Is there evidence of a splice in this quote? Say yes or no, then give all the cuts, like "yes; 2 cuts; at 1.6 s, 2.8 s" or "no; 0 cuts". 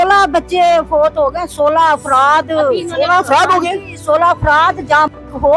no; 0 cuts